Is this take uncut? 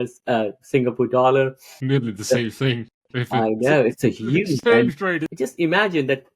no; 2 cuts; at 1.7 s, 5.3 s

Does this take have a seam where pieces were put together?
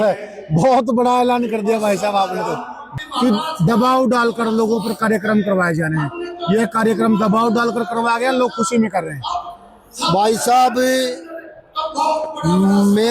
yes; 1 cut; at 2.8 s

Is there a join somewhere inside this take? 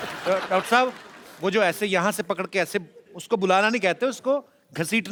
no; 0 cuts

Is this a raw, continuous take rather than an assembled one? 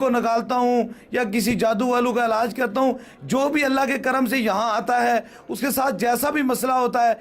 yes; 0 cuts

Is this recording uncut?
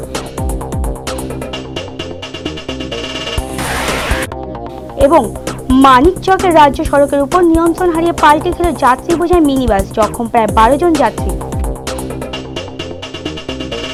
yes; 0 cuts

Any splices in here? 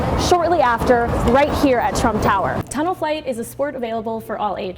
yes; 1 cut; at 2.6 s

